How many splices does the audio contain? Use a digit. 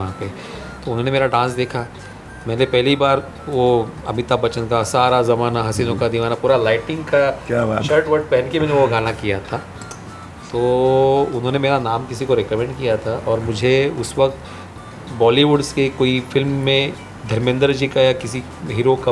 0